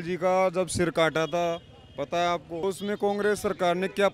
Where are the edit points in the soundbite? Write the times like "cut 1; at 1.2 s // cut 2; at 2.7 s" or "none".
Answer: cut 1; at 2.6 s